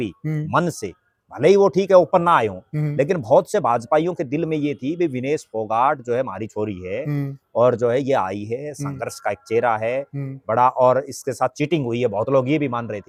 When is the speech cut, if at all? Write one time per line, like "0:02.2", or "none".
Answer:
none